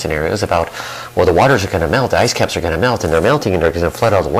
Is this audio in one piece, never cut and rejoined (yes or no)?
no